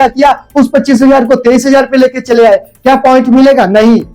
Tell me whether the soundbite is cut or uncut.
uncut